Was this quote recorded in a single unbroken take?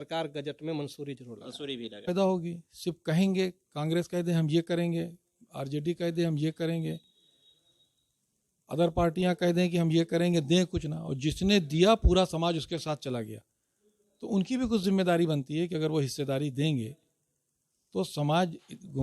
no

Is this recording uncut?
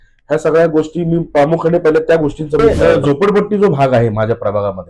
no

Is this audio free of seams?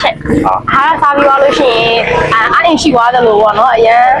yes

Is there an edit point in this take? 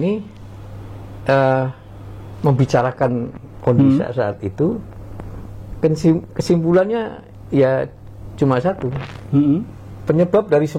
no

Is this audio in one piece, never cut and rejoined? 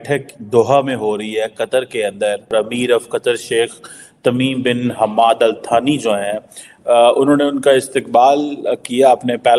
no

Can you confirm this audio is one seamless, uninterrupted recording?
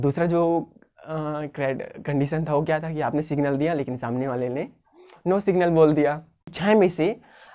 no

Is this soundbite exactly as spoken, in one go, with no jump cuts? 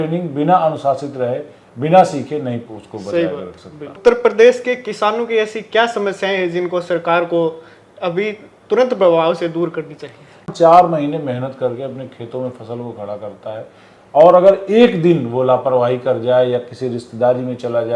no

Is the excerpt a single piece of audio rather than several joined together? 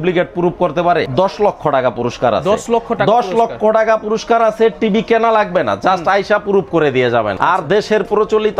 no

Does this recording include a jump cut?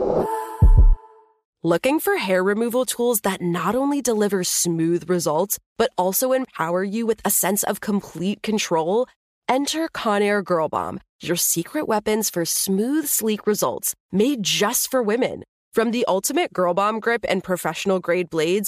yes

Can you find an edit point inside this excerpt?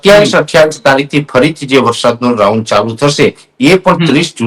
no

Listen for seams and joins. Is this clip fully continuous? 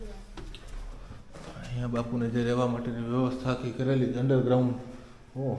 yes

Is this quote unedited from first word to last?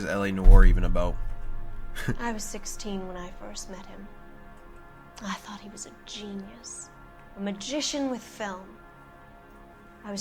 yes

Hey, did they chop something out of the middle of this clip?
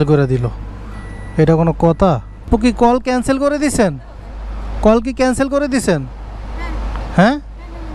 no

